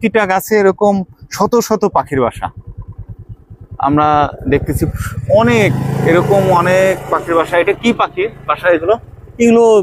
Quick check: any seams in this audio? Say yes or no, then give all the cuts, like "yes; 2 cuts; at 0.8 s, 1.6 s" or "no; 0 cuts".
no; 0 cuts